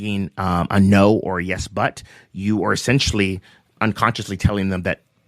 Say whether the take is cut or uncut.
cut